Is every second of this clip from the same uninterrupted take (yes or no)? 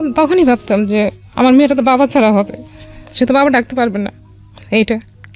yes